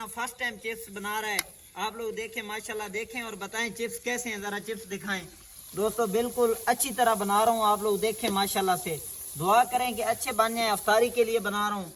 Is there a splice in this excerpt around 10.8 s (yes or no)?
no